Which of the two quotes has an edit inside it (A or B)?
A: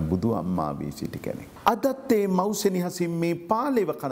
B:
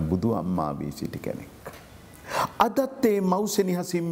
A